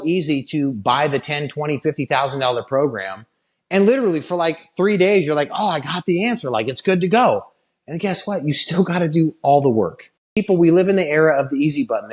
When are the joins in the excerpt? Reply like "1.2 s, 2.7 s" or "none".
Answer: 10.4 s

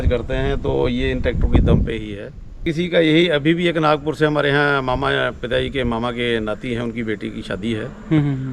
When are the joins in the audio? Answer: 2.6 s

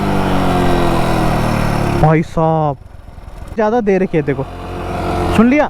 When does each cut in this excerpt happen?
3.5 s

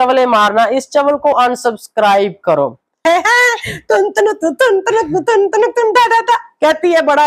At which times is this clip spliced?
3.0 s

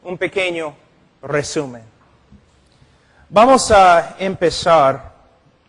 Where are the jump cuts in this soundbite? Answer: 4.2 s

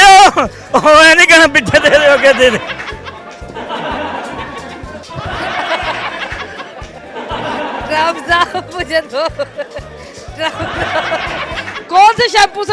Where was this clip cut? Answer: 11.7 s

